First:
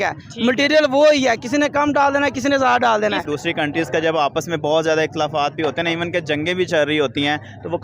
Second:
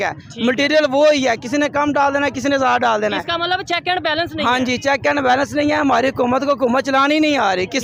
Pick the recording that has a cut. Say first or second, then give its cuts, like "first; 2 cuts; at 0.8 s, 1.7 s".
first; 1 cut; at 3.3 s